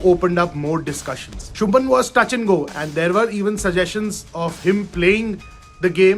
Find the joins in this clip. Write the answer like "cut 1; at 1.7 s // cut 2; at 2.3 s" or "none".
cut 1; at 1.5 s // cut 2; at 2.7 s